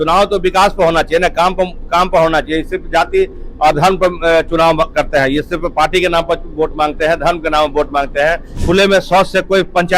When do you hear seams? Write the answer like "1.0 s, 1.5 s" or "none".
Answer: 8.5 s